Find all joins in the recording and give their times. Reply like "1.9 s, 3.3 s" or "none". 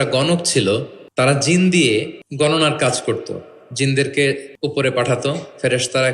1.0 s, 2.2 s, 4.5 s